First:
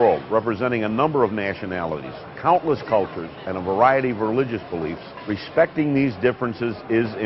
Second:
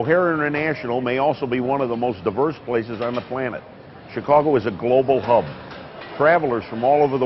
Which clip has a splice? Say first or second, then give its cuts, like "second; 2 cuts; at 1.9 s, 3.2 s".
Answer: first; 1 cut; at 2.8 s